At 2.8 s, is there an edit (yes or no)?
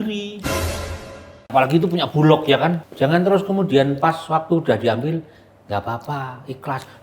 yes